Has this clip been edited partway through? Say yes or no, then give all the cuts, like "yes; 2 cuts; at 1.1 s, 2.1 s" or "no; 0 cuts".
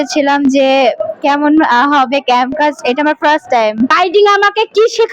yes; 1 cut; at 3.9 s